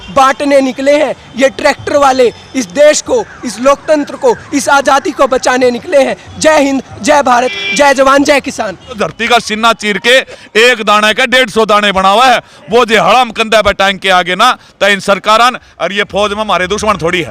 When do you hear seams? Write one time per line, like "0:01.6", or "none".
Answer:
0:09.1